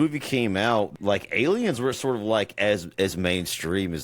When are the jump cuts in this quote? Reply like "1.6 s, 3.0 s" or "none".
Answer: 0.9 s